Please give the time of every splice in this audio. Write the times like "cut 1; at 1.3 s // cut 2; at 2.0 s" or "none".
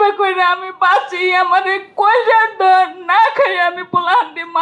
none

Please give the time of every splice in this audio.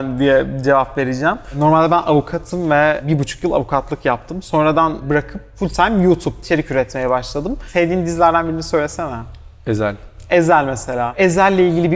cut 1; at 1.6 s // cut 2; at 3.0 s // cut 3; at 5.0 s // cut 4; at 6.4 s // cut 5; at 7.7 s // cut 6; at 11.1 s

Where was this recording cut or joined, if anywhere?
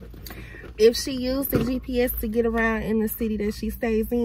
none

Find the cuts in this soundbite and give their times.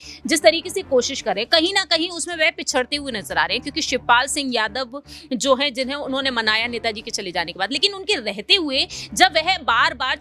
none

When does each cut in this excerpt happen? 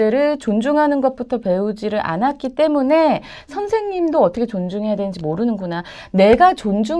none

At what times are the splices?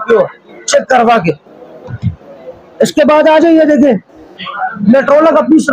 none

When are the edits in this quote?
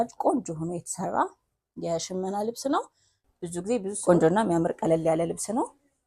cut 1; at 3.9 s

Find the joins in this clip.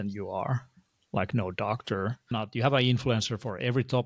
cut 1; at 2.3 s

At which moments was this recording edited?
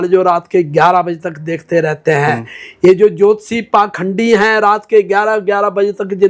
none

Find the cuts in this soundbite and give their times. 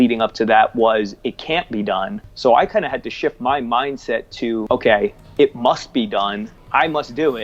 cut 1; at 2.2 s // cut 2; at 4.6 s // cut 3; at 6.5 s

